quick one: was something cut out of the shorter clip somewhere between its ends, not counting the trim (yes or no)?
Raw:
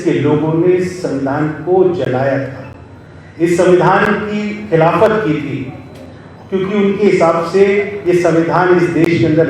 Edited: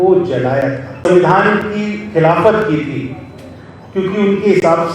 yes